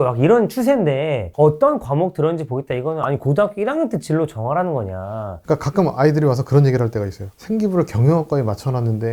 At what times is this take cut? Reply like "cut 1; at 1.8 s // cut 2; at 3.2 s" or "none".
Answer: cut 1; at 5.4 s